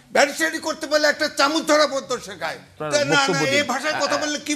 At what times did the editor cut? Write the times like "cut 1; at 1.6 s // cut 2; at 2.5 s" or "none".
cut 1; at 2.7 s